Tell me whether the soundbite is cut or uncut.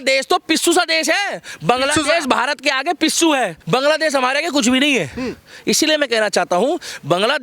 cut